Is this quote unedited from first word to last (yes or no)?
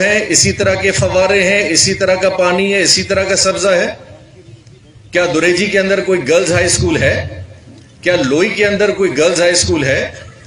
yes